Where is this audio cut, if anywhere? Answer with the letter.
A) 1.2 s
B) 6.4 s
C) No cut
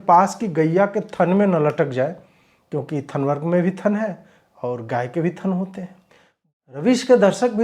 B